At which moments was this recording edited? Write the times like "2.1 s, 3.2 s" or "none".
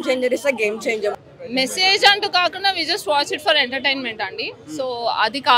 1.1 s